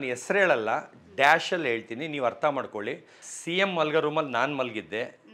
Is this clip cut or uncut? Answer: cut